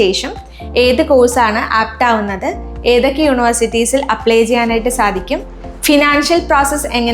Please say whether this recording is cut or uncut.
uncut